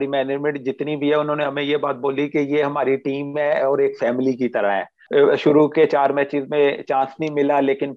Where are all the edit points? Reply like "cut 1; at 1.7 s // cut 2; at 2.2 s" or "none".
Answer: cut 1; at 4.9 s